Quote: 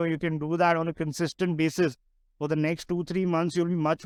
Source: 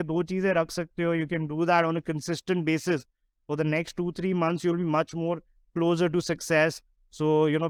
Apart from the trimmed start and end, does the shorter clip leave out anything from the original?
no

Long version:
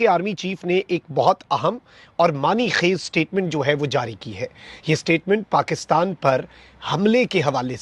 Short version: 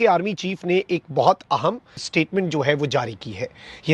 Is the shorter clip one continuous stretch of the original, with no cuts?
no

